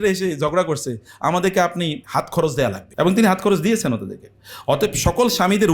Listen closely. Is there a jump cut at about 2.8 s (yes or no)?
yes